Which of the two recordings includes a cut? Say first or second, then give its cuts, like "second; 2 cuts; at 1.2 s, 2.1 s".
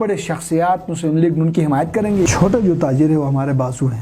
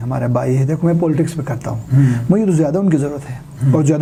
first; 1 cut; at 2.3 s